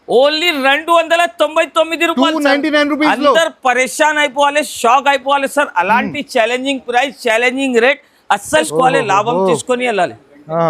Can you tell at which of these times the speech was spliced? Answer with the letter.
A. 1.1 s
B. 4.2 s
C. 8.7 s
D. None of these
C